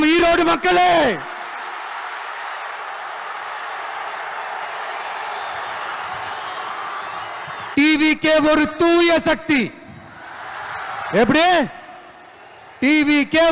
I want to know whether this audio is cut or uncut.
uncut